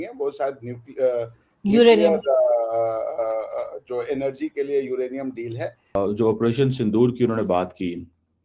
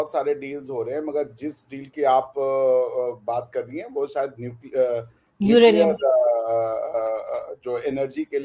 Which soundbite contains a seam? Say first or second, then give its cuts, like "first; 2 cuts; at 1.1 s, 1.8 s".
first; 1 cut; at 5.9 s